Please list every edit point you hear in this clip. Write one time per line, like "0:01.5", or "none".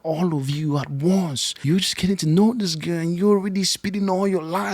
0:01.5